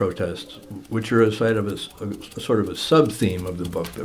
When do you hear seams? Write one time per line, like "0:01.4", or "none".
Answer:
none